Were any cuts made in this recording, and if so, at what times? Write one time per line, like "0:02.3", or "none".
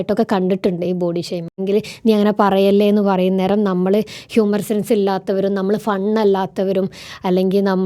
0:01.6